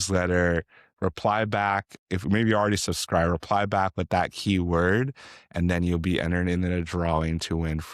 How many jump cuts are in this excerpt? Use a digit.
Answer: 0